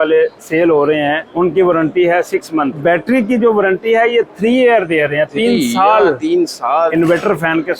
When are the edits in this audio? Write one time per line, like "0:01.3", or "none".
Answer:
0:01.2
0:02.8
0:06.9